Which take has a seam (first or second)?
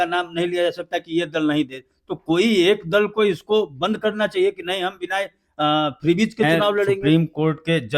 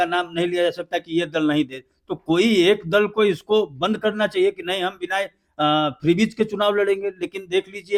first